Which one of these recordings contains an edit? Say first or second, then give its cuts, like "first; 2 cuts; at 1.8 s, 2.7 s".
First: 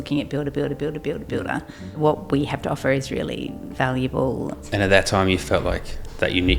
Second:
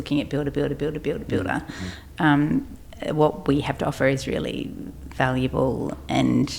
first; 3 cuts; at 1.8 s, 3.6 s, 4.6 s